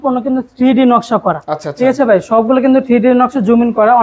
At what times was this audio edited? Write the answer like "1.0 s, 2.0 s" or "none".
none